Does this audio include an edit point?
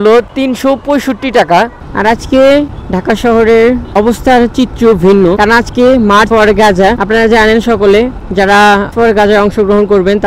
yes; 1 cut; at 1.8 s

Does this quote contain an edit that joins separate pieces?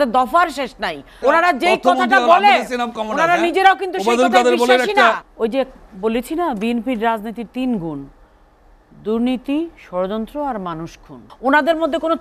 yes; 3 cuts; at 1.1 s, 5.3 s, 11.2 s

